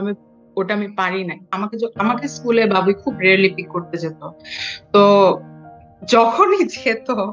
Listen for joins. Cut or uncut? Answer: cut